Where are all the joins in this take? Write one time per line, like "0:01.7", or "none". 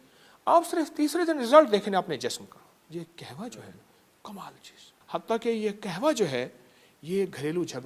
0:02.8
0:04.9